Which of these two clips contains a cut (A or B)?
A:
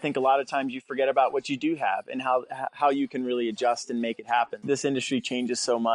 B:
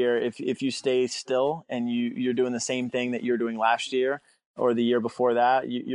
A